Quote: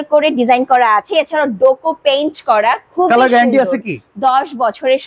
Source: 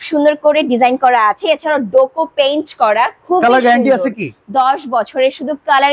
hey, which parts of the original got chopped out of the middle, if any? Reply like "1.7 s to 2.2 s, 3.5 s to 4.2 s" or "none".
none